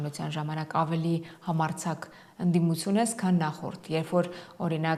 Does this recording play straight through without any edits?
yes; 0 cuts

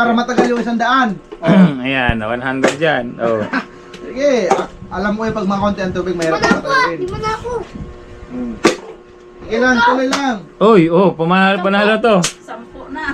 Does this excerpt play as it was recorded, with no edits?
yes; 0 cuts

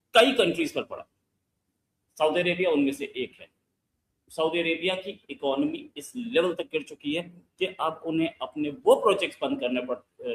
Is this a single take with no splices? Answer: yes; 0 cuts

